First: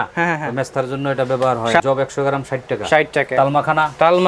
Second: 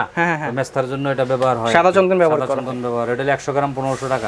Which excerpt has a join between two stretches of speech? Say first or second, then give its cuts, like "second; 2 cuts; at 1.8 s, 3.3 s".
first; 2 cuts; at 1.8 s, 3.3 s